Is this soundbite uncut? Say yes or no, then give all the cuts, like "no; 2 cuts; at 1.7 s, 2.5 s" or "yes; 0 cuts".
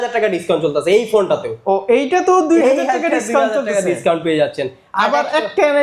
yes; 0 cuts